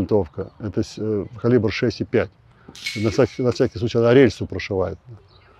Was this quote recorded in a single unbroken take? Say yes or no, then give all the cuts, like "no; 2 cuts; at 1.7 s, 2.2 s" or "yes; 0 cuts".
yes; 0 cuts